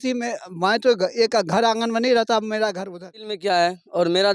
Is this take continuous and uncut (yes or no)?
no